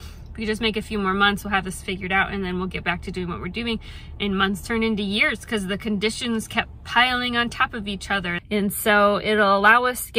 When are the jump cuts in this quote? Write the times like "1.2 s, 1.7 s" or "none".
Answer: 8.3 s